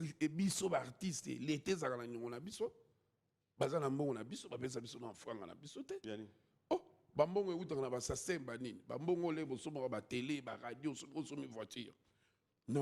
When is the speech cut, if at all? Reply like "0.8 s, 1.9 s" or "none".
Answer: none